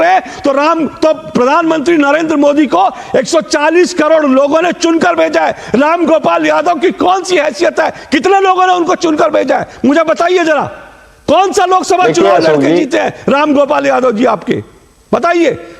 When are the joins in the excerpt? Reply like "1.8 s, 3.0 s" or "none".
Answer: none